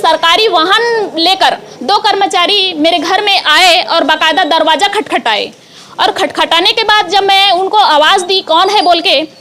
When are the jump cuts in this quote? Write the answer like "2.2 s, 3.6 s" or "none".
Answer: none